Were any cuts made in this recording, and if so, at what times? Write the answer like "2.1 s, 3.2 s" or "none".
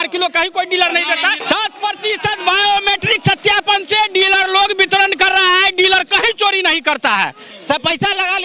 1.4 s, 7.5 s

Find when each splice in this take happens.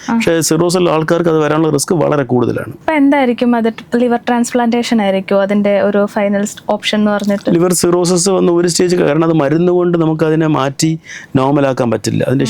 none

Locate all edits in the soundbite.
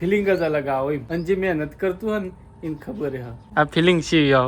1.0 s, 3.3 s

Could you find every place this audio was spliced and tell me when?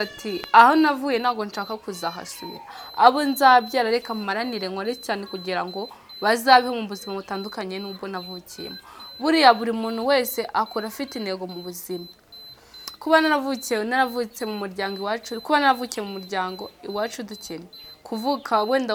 none

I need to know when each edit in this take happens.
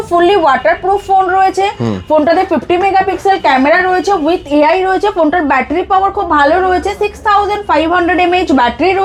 none

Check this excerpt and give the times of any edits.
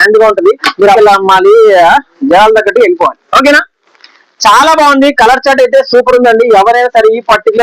1.0 s

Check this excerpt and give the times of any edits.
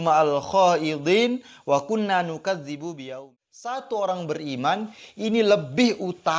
3.0 s

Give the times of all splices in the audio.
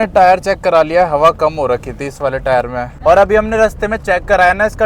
2.9 s

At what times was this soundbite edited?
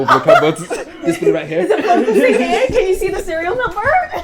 none

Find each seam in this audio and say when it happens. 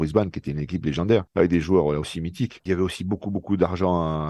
2.6 s

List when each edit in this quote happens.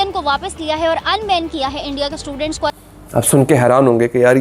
2.8 s

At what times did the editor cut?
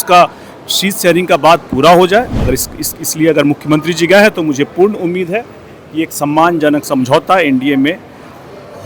none

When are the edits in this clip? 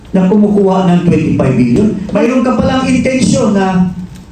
2.1 s

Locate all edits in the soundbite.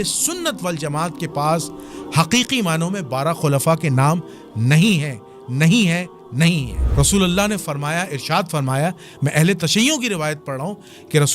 6.8 s

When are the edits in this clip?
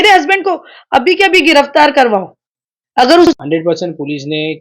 3.3 s

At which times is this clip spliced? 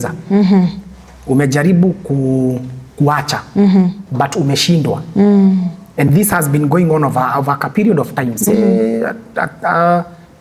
none

